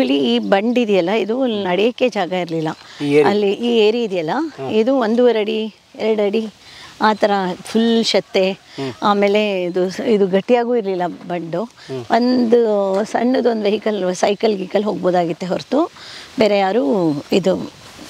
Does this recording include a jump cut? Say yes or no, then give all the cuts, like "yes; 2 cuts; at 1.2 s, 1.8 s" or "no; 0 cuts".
no; 0 cuts